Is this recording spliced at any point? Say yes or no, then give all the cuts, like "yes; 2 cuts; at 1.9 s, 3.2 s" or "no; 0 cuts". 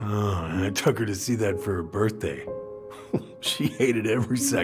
no; 0 cuts